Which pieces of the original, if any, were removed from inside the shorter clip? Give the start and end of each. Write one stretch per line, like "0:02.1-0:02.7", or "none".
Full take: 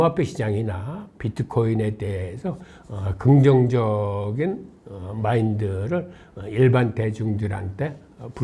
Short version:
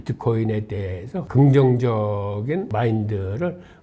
0:02.6-0:03.2
0:04.6-0:05.2